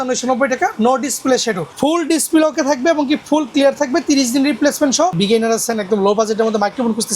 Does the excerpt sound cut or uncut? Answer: cut